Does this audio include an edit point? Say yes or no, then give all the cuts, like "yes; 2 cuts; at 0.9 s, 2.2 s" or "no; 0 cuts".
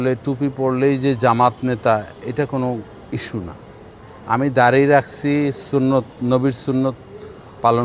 no; 0 cuts